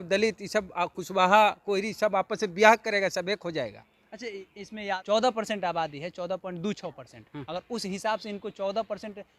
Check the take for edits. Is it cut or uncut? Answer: cut